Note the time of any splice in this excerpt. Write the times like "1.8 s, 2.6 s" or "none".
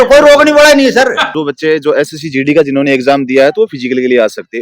1.2 s